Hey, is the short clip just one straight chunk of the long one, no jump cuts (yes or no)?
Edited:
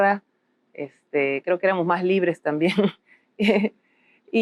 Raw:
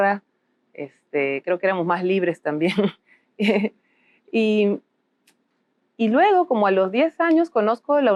yes